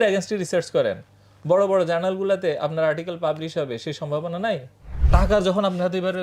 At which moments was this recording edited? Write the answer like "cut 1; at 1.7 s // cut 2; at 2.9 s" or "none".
cut 1; at 5.0 s